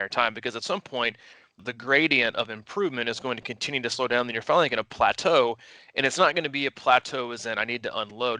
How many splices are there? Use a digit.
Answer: 1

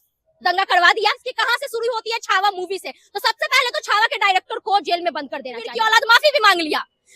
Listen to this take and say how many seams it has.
2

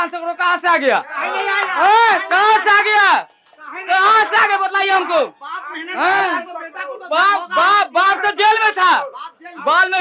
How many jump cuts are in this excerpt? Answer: 0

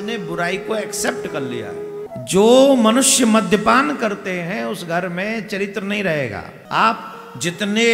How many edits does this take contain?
2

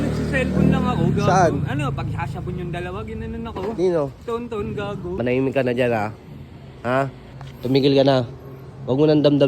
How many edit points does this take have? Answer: 1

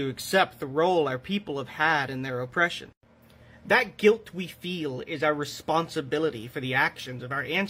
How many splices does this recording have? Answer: 0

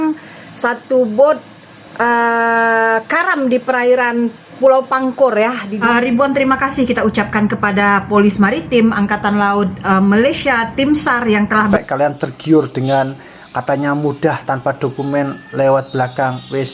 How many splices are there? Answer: 2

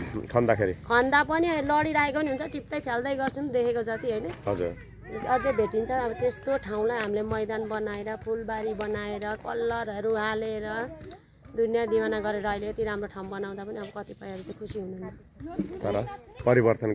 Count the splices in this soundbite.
0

